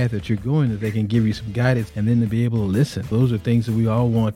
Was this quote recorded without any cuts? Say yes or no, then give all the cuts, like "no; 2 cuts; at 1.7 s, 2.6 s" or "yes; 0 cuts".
no; 2 cuts; at 1.9 s, 3.1 s